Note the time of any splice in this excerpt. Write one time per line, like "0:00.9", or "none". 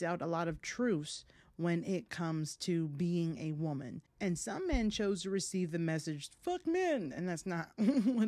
none